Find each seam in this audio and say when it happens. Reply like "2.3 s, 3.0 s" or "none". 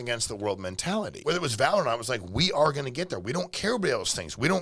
1.2 s